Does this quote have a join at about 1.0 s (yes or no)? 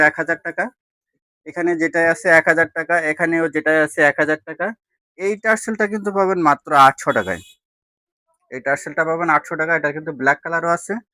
no